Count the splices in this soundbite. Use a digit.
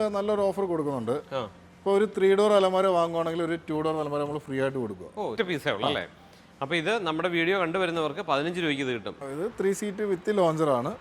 2